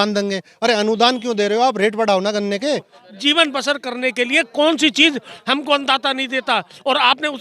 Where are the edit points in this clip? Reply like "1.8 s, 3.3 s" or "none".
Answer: 2.9 s